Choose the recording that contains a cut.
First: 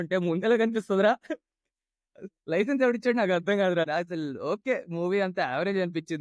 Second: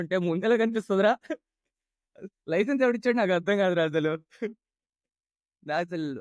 first; 1 cut; at 3.9 s

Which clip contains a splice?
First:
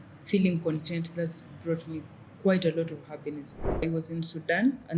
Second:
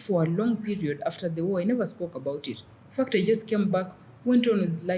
first; 1 cut; at 3.9 s

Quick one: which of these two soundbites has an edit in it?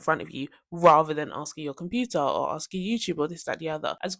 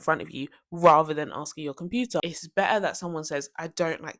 second; 1 cut; at 2.2 s

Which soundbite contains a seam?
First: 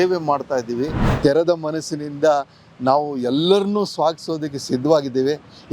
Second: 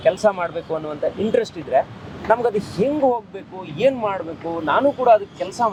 first; 1 cut; at 1.0 s

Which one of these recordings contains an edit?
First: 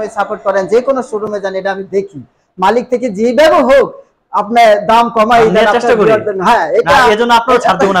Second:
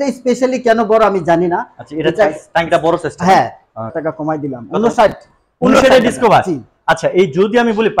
second; 1 cut; at 3.9 s

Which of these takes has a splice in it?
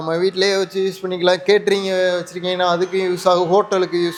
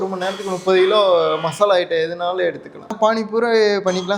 second; 1 cut; at 2.9 s

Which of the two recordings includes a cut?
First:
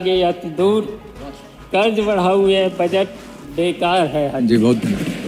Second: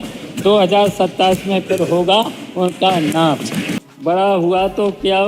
second; 1 cut; at 3.8 s

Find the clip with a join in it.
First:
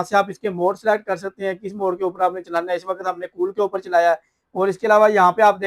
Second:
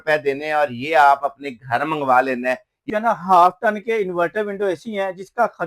second; 1 cut; at 2.9 s

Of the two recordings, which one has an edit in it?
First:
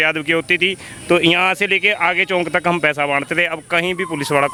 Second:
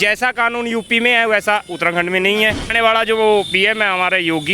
second; 1 cut; at 2.7 s

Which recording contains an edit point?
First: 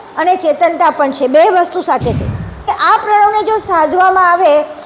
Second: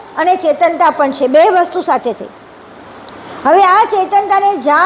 first; 1 cut; at 2.6 s

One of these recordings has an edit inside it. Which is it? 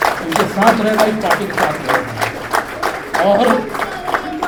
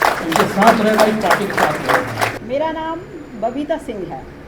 second; 1 cut; at 2.4 s

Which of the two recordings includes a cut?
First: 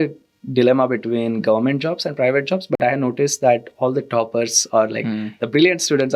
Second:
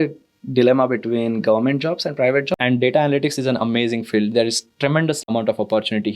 second; 2 cuts; at 2.5 s, 5.2 s

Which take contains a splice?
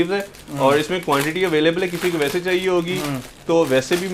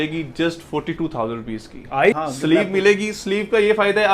second; 1 cut; at 2.2 s

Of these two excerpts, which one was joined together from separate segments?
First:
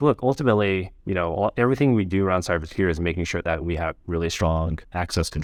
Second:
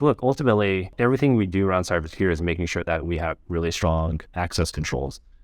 second; 1 cut; at 1.0 s

